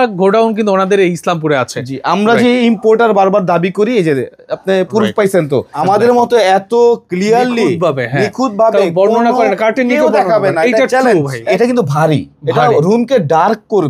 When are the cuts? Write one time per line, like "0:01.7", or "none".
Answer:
0:05.8
0:11.5